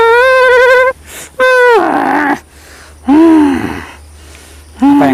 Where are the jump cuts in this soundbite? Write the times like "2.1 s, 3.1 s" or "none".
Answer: none